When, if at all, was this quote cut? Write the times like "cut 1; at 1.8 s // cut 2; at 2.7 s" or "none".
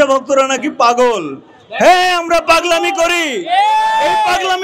none